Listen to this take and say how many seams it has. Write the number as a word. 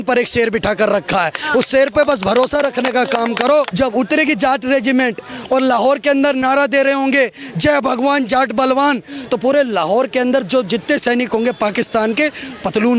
one